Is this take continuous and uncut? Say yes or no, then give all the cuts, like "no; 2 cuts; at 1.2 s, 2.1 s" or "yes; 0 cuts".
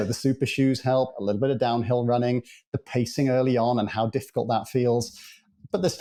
yes; 0 cuts